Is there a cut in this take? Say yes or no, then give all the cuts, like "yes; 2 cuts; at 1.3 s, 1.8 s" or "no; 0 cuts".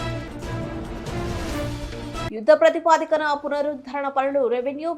yes; 1 cut; at 2.3 s